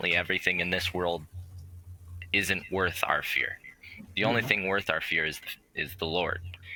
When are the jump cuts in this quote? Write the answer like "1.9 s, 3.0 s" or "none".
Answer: none